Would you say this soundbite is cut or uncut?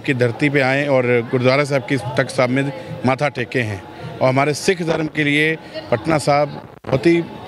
uncut